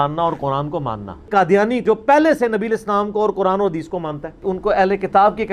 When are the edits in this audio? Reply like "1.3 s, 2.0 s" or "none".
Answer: 1.1 s